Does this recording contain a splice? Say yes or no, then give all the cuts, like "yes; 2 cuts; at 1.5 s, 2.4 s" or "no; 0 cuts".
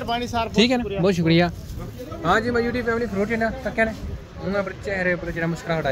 no; 0 cuts